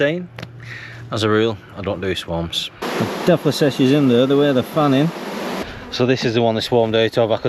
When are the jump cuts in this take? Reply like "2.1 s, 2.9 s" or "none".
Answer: 2.8 s, 5.6 s